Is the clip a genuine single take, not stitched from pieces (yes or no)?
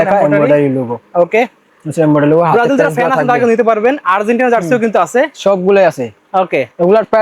yes